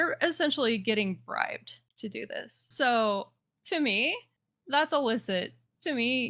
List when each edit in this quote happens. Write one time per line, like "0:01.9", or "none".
none